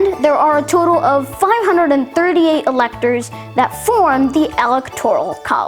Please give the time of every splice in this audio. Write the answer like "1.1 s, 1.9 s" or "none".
none